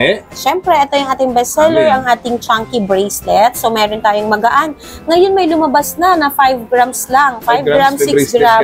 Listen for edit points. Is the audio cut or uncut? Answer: uncut